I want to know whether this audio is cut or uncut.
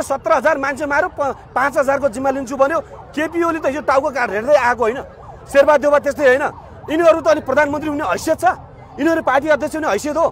uncut